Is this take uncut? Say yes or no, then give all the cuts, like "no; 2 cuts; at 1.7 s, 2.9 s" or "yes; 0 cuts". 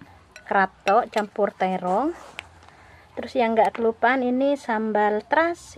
yes; 0 cuts